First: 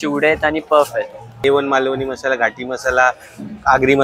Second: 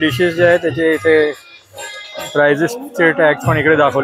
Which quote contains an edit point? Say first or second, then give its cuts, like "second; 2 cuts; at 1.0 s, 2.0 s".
first; 1 cut; at 1.4 s